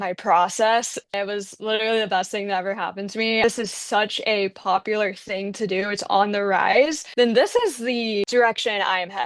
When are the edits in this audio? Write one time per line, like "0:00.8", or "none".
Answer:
0:01.1
0:03.4
0:07.0